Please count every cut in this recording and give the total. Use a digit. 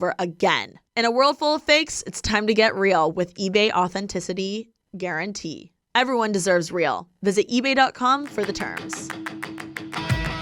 1